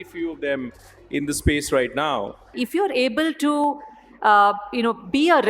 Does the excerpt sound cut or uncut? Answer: cut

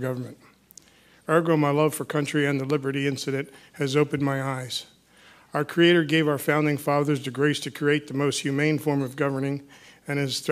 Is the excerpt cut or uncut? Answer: cut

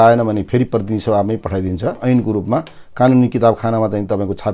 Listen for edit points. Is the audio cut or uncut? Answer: cut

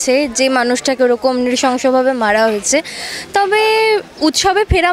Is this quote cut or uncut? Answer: uncut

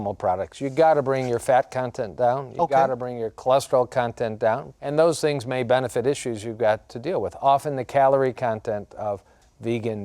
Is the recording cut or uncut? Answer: cut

